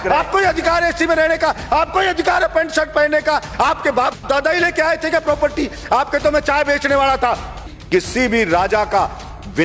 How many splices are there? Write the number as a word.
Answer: one